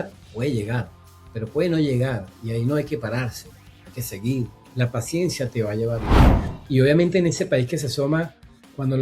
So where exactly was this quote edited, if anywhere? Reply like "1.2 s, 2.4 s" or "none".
4.6 s, 6.2 s